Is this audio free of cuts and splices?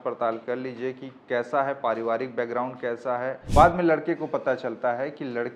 no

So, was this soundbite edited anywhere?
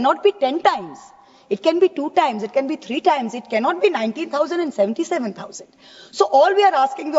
no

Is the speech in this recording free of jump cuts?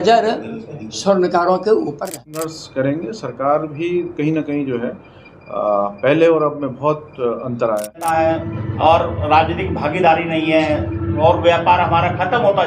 no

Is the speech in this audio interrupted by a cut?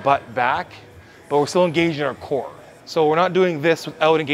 no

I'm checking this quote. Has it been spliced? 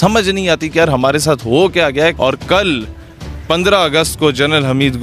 yes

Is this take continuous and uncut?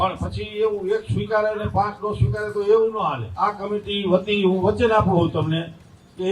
no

